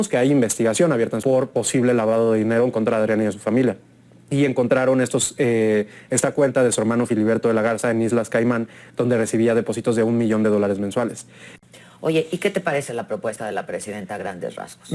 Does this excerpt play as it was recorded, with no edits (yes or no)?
no